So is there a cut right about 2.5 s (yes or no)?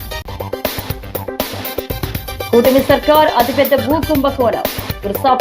yes